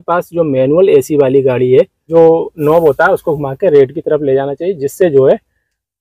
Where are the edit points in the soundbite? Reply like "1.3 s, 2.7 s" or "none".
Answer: 2.0 s